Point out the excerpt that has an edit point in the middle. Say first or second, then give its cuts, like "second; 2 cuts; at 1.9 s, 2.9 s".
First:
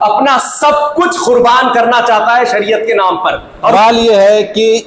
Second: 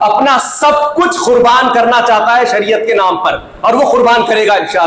first; 1 cut; at 3.7 s